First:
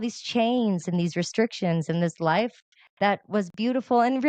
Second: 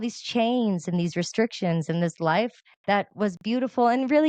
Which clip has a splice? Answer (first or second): second